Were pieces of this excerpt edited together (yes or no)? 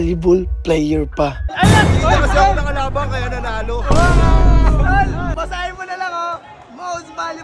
yes